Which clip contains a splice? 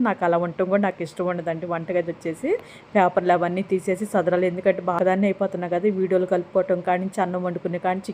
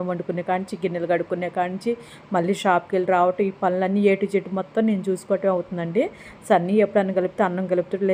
first; 1 cut; at 5.0 s

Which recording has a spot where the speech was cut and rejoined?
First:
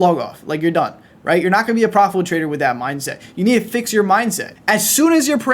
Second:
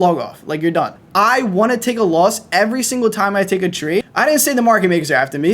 second; 2 cuts; at 1.0 s, 4.1 s

